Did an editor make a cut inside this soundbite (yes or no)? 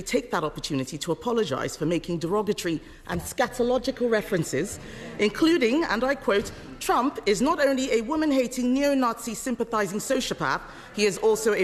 no